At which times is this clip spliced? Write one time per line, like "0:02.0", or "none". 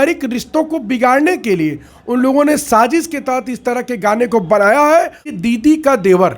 0:05.3